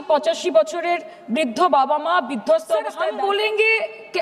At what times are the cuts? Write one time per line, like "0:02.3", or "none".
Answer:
0:03.0